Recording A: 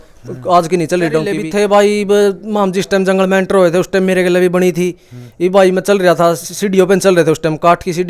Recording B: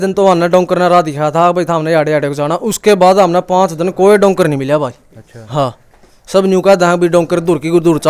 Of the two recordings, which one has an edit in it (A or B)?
A